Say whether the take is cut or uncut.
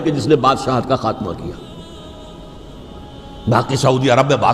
uncut